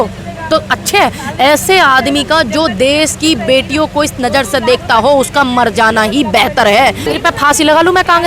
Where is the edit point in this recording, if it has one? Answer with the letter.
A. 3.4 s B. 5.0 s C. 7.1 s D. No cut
C